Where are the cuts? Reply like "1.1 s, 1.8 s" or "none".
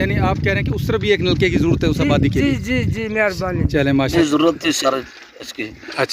4.1 s